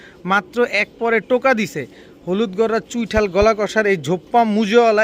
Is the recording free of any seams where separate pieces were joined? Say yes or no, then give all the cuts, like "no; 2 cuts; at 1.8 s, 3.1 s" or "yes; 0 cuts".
yes; 0 cuts